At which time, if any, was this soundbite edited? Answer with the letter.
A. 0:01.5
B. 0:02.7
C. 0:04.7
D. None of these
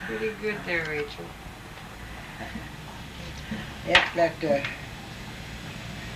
C